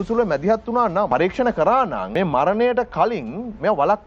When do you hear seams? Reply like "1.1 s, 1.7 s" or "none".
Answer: 1.1 s, 2.0 s